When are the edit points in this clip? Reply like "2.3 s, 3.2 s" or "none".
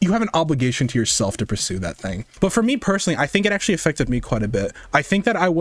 2.3 s